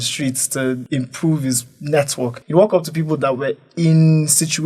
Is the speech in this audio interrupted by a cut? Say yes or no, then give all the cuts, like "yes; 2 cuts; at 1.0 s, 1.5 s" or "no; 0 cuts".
yes; 2 cuts; at 0.8 s, 2.4 s